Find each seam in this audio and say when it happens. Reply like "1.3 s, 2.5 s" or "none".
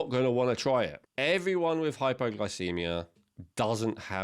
1.0 s